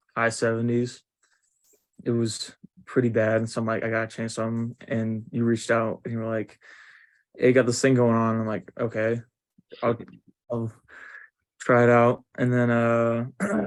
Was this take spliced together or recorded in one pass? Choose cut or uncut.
uncut